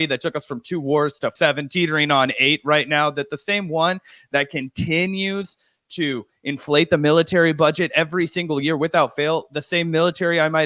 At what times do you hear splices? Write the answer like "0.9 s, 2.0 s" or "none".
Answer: 1.3 s